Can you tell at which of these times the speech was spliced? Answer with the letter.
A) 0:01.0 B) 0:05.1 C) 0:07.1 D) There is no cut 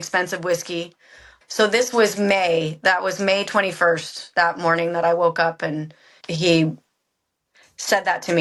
D